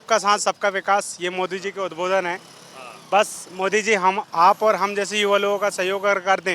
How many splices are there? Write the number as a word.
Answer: zero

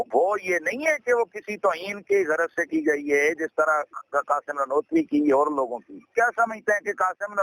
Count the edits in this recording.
zero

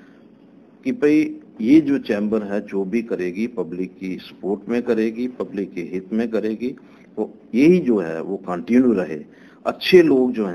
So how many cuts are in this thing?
zero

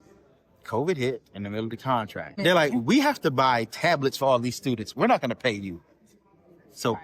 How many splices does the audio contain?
one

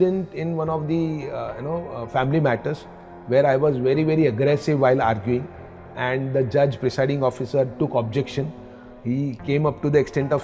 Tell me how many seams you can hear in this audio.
zero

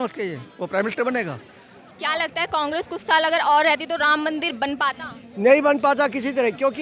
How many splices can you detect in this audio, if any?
one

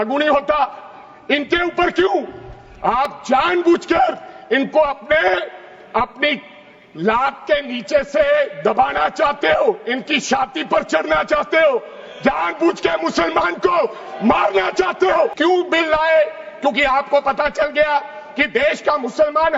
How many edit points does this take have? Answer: one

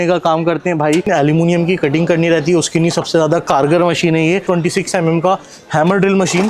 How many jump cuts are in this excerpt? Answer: two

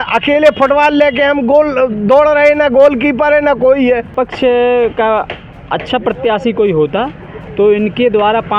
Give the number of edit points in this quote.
one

